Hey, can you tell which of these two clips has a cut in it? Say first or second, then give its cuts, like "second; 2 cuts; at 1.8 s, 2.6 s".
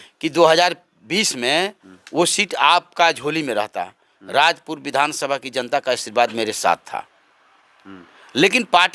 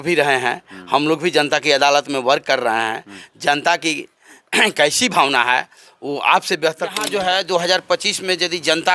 second; 1 cut; at 7.1 s